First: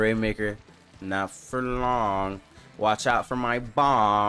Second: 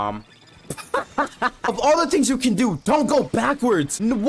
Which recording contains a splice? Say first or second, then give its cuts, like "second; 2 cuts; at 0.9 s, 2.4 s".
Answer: second; 1 cut; at 1.6 s